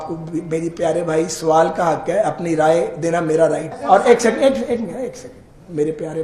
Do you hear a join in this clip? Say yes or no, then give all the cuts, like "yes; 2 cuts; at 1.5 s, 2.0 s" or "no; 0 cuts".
yes; 1 cut; at 3.7 s